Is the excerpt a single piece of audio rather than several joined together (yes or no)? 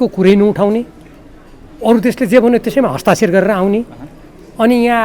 yes